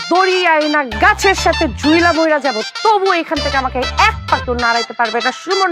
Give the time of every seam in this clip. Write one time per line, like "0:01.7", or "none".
none